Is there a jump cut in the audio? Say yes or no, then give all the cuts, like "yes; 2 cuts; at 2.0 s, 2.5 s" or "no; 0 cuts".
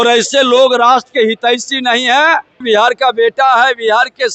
yes; 1 cut; at 2.6 s